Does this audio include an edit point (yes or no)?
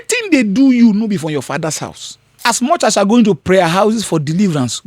yes